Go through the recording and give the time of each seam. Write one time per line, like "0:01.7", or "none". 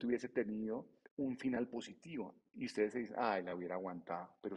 0:01.0